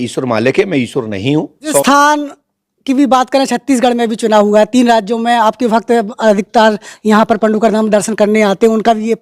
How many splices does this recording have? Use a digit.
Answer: 1